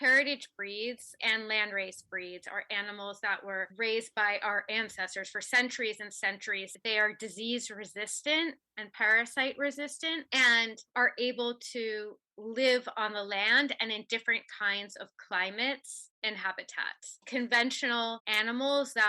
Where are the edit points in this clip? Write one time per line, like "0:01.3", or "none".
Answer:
0:01.2
0:06.7